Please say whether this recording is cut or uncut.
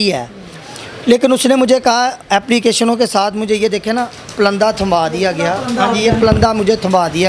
uncut